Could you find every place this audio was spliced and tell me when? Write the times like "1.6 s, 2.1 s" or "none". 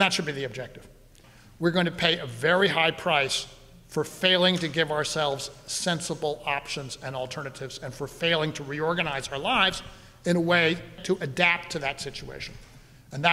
1.1 s, 11.0 s

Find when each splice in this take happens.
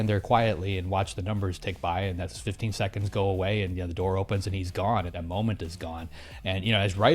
5.1 s

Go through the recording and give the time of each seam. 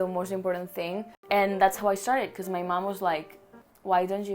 1.1 s

